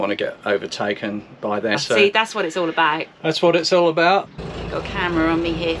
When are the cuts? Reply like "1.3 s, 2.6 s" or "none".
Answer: 1.7 s, 4.3 s